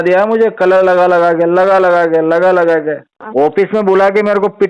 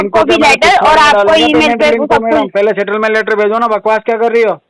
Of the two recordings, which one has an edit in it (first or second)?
first